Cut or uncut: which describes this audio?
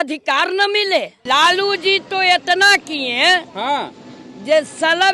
cut